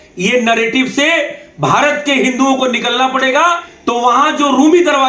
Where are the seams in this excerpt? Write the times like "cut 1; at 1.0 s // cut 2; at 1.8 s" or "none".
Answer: cut 1; at 3.7 s